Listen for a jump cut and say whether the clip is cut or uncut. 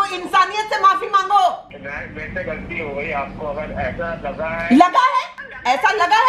uncut